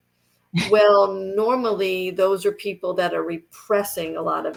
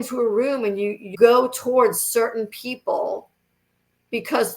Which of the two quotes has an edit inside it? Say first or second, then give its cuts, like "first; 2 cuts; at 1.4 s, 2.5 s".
second; 1 cut; at 1.1 s